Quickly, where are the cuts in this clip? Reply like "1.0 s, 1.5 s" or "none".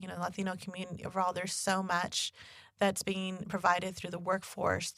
none